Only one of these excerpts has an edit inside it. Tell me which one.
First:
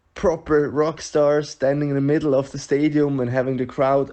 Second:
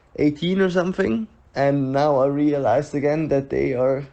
second; 1 cut; at 1.4 s

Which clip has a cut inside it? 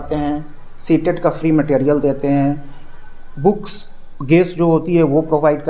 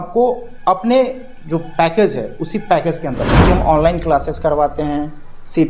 second; 1 cut; at 3.3 s

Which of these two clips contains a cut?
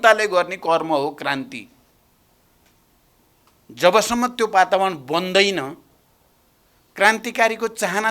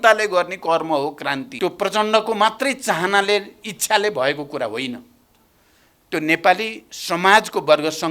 second; 1 cut; at 1.5 s

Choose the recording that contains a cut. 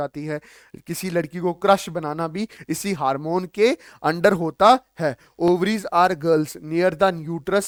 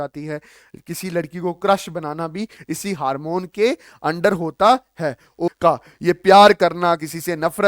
second; 1 cut; at 5.5 s

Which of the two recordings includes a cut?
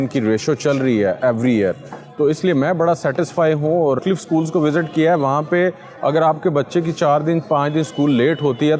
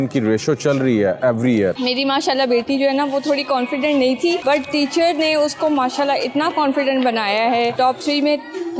second; 3 cuts; at 1.8 s, 4.4 s, 7.8 s

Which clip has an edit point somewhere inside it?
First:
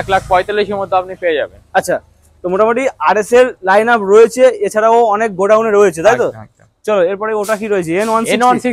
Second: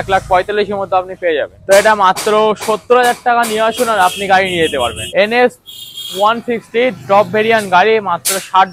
second; 2 cuts; at 1.5 s, 5.0 s

